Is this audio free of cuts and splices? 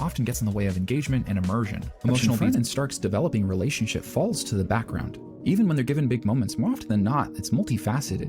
no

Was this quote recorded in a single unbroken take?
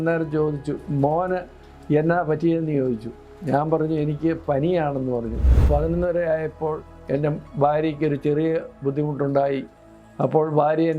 no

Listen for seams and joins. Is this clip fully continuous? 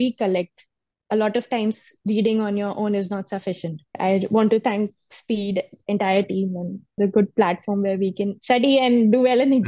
no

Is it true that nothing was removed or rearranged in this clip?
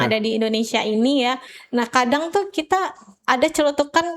no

